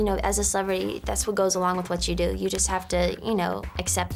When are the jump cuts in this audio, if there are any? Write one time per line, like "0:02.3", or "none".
none